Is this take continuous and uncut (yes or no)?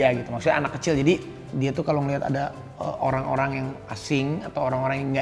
no